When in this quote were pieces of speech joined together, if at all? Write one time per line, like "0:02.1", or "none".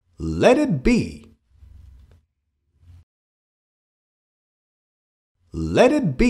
0:01.4